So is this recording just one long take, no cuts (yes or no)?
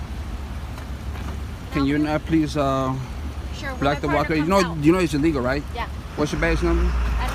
yes